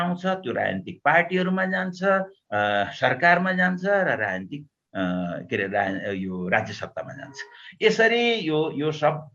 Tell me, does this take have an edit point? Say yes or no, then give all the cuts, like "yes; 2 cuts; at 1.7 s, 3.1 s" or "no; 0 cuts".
no; 0 cuts